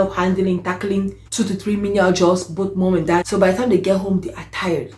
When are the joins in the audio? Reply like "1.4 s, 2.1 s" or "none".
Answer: none